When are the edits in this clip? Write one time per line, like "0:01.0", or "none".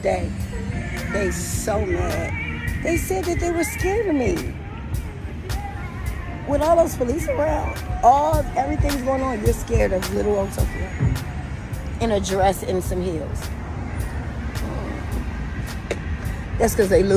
none